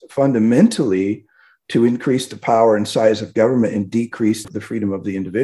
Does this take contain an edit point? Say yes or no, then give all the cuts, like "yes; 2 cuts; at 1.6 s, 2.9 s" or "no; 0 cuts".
yes; 1 cut; at 4.4 s